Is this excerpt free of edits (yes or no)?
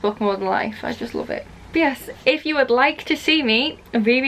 yes